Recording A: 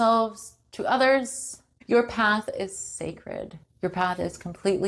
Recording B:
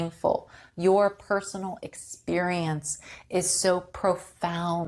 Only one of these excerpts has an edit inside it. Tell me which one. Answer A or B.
A